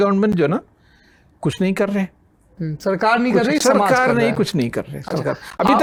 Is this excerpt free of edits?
yes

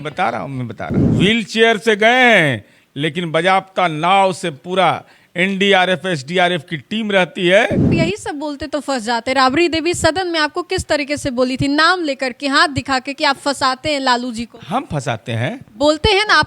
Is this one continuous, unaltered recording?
no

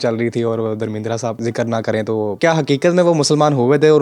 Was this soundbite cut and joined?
yes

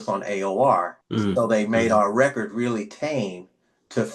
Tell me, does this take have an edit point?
yes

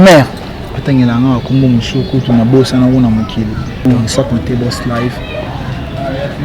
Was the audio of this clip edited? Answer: yes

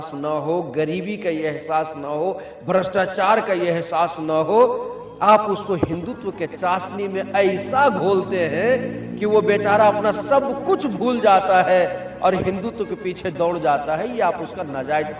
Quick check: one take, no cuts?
yes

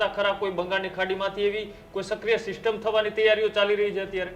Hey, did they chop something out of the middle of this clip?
no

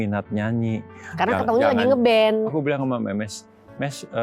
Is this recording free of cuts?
no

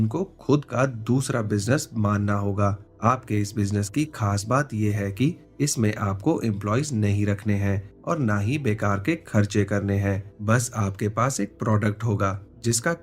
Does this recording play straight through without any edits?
yes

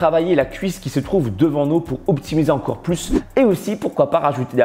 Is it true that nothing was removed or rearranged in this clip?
no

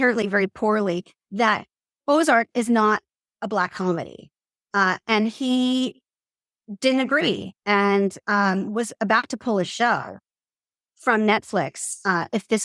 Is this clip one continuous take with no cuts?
yes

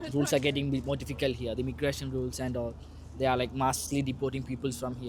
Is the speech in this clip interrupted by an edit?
no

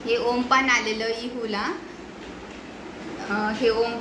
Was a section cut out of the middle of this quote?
no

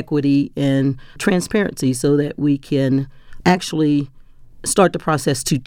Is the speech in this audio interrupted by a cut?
no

